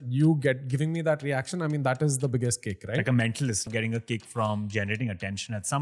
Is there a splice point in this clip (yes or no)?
yes